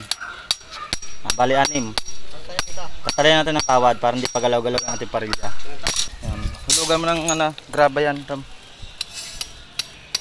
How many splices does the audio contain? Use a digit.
1